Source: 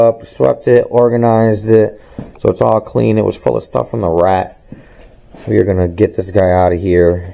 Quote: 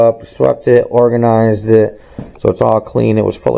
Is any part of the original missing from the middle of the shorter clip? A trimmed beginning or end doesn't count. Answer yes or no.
no